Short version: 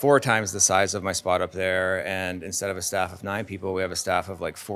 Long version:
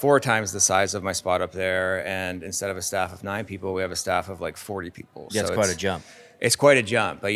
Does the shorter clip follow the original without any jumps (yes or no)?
yes